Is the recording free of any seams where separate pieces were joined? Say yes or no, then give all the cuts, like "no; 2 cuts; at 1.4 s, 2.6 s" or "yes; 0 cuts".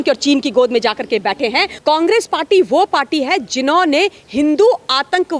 no; 1 cut; at 1.7 s